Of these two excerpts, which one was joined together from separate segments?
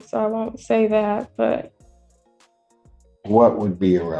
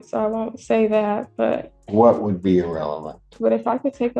second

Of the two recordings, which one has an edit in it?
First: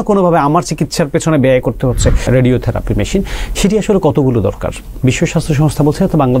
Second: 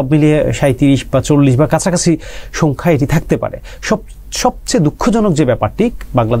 first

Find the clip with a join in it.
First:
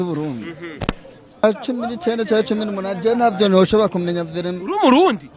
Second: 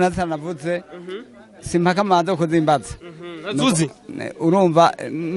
first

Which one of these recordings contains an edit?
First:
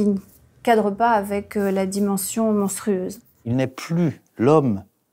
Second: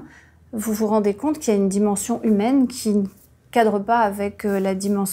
first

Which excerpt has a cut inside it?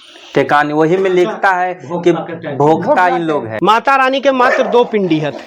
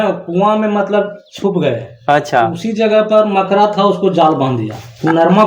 first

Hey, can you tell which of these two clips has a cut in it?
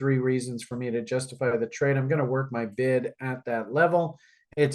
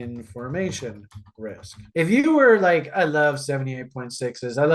second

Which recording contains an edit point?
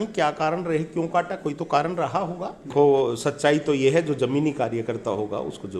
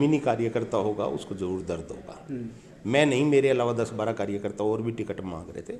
first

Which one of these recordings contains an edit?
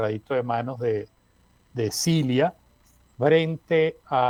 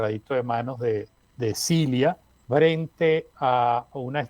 second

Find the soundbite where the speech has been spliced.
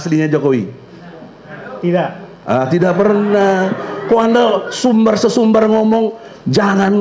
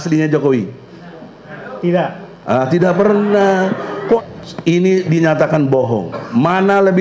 second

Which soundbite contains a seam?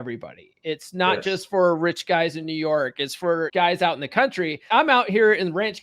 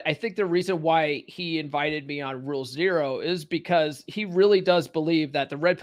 first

